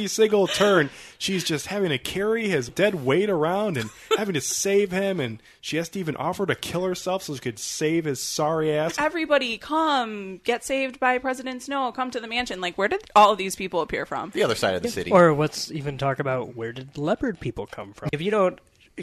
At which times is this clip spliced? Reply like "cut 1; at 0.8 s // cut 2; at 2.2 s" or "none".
cut 1; at 2.7 s // cut 2; at 8.9 s // cut 3; at 18.1 s

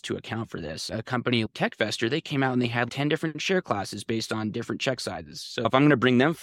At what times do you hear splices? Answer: cut 1; at 1.5 s // cut 2; at 2.9 s

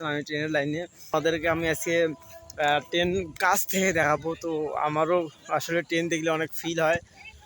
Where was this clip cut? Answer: cut 1; at 1.1 s

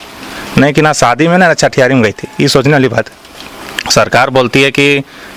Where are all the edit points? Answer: none

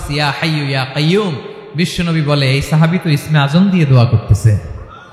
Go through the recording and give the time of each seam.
none

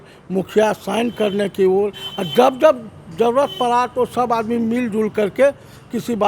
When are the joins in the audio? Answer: none

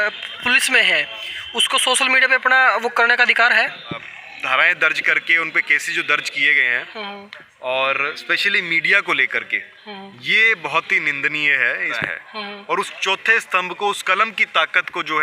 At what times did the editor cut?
cut 1; at 4.0 s // cut 2; at 12.1 s

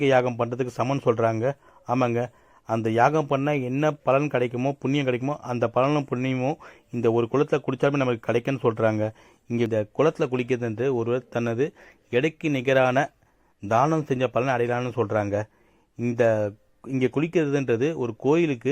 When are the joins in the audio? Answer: cut 1; at 9.7 s

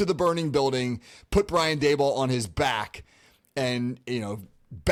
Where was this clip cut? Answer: none

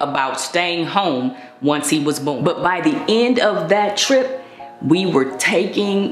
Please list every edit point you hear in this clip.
cut 1; at 2.4 s

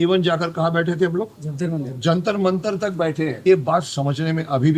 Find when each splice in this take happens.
cut 1; at 3.4 s

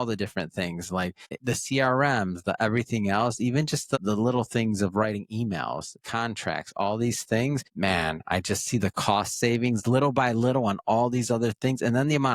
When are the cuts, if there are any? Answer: cut 1; at 1.3 s

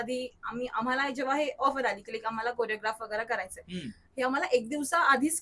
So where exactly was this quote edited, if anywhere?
none

